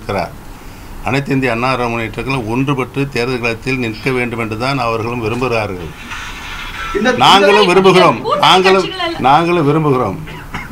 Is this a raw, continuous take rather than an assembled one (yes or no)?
yes